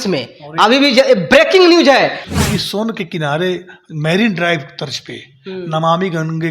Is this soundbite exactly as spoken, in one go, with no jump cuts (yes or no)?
no